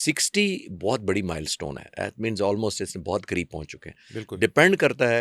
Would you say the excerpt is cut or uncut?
uncut